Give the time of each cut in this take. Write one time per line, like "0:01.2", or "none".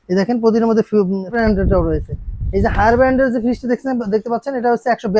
0:01.4